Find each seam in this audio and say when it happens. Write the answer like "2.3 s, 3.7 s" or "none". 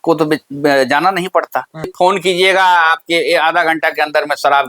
1.9 s